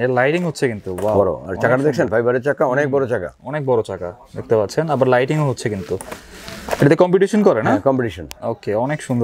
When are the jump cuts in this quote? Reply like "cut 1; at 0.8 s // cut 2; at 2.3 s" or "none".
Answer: none